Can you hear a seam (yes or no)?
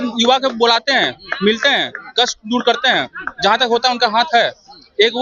no